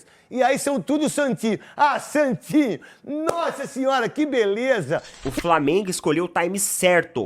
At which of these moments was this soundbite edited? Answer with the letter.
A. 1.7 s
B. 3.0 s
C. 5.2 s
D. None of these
C